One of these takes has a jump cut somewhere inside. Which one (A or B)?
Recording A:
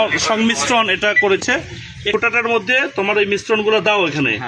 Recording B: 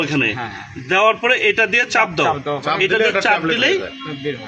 A